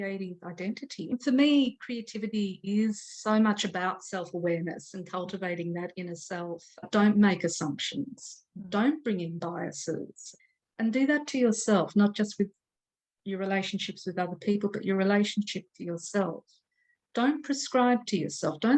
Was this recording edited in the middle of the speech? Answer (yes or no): yes